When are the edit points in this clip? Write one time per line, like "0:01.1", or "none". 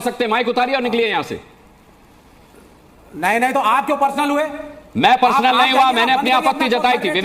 none

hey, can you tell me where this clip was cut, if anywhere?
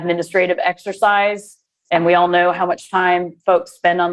none

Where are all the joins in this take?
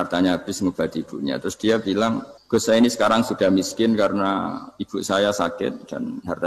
0:02.3

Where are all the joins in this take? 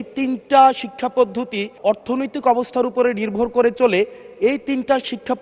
0:01.7

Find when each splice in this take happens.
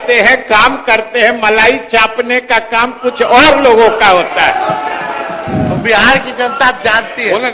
none

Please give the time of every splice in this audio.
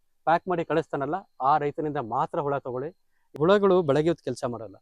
0:03.4

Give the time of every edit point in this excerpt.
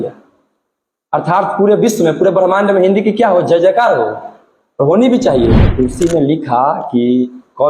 0:05.7

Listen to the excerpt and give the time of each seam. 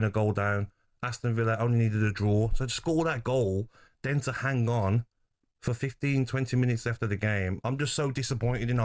none

